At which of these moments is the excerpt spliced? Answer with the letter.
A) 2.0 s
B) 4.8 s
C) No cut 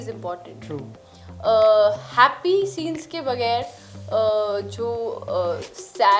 C